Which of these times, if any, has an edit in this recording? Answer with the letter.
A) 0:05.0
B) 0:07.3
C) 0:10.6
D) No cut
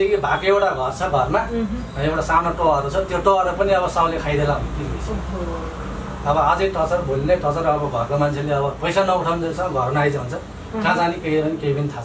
D